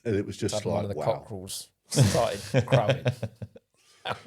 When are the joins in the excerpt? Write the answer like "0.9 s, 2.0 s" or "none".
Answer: 0.9 s